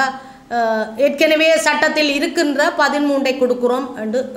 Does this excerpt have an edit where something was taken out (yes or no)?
no